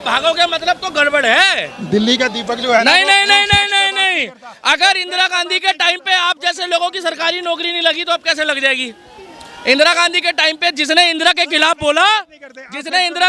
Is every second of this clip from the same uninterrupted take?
yes; 0 cuts

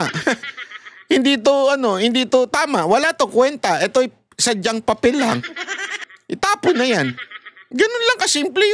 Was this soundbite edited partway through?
no; 0 cuts

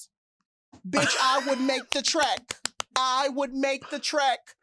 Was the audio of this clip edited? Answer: no; 0 cuts

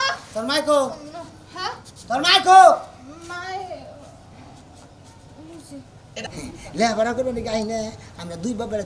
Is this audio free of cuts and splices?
no; 1 cut; at 6.1 s

